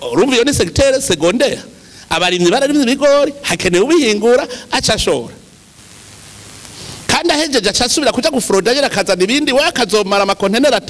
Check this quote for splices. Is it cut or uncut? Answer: cut